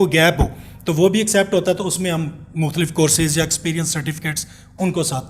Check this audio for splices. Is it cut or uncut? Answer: uncut